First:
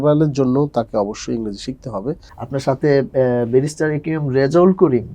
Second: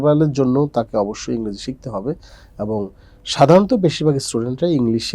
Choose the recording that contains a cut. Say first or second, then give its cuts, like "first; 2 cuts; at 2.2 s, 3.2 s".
first; 1 cut; at 2.3 s